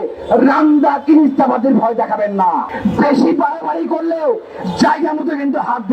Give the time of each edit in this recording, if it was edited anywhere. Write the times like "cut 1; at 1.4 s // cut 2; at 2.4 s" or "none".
cut 1; at 2.7 s